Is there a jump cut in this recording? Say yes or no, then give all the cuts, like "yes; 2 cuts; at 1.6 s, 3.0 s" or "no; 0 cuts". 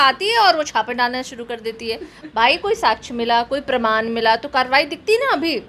no; 0 cuts